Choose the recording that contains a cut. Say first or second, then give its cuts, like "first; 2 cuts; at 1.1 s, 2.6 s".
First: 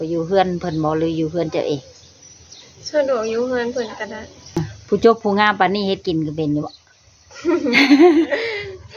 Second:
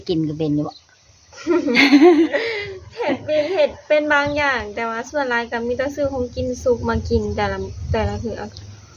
first; 1 cut; at 4.7 s